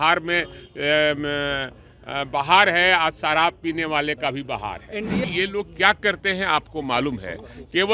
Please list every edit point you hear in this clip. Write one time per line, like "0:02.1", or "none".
0:05.2